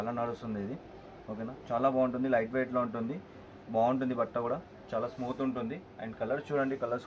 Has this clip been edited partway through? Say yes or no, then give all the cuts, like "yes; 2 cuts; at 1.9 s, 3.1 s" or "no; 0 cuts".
no; 0 cuts